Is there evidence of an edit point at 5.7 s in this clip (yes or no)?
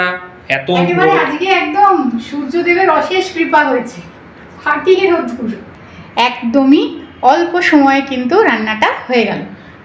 yes